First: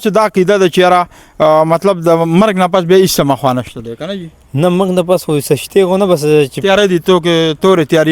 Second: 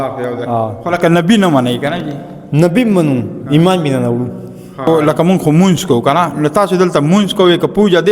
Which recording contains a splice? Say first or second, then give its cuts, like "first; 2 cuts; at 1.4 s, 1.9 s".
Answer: second; 1 cut; at 4.9 s